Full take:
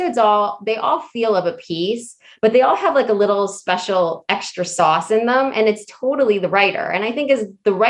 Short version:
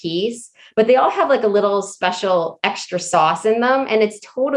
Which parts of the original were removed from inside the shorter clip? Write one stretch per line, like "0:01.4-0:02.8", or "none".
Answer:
none